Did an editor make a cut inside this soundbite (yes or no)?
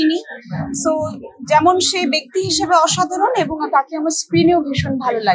no